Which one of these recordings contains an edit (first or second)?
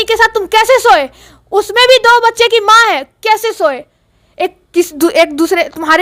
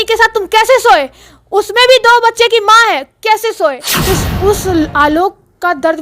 second